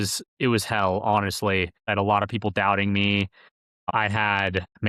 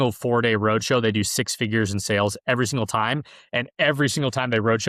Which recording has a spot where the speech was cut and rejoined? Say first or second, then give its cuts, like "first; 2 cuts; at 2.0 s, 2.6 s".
first; 2 cuts; at 1.9 s, 3.9 s